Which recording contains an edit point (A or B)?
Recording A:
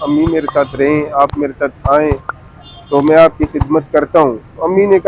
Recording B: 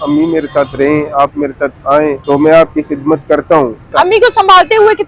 B